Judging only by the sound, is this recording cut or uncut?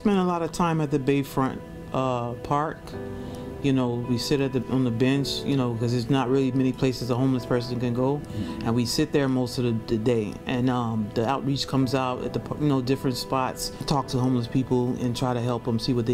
cut